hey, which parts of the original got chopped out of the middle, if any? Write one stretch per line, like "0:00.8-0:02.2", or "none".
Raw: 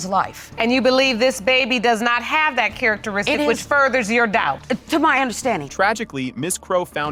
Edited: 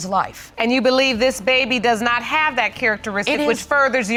none

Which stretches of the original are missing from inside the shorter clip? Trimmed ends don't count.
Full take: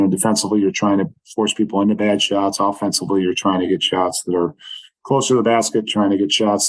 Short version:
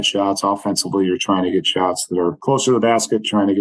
0:04.5-0:05.0

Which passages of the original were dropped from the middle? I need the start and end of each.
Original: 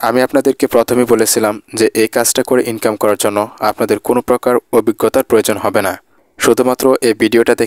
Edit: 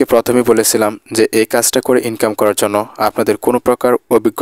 none

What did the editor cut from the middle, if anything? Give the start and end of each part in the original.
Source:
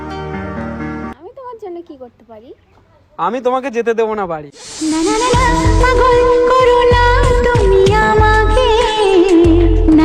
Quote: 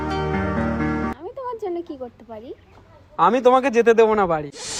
none

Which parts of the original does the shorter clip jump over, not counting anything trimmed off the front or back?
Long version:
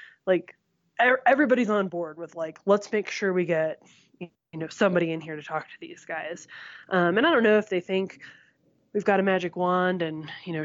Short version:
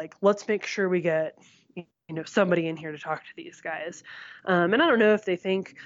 none

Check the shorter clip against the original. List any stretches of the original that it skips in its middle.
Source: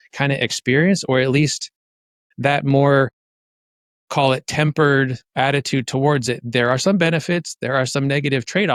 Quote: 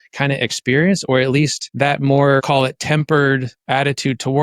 0:01.6-0:02.3
0:03.1-0:04.1

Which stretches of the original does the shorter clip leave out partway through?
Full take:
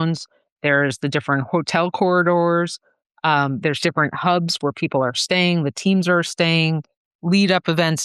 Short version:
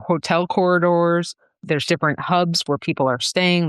0:03.1-0:03.6

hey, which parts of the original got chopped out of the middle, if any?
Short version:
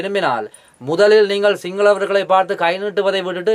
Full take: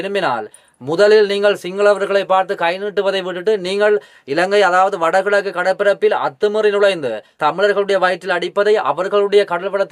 none

